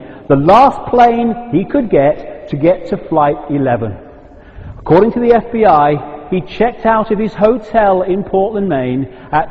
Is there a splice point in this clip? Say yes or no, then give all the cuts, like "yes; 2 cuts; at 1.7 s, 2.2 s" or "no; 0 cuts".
yes; 1 cut; at 3.7 s